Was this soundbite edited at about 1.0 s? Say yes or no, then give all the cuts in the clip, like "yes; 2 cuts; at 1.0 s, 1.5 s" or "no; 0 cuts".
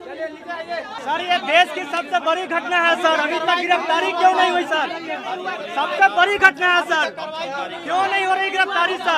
yes; 1 cut; at 1.0 s